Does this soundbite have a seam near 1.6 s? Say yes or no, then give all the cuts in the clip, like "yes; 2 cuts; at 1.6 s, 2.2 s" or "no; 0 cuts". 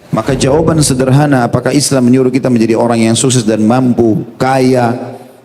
no; 0 cuts